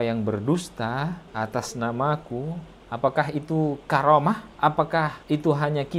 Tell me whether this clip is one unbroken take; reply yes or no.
no